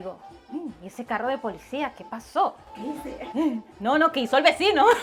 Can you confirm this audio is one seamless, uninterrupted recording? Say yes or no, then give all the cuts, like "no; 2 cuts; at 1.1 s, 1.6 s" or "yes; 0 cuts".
yes; 0 cuts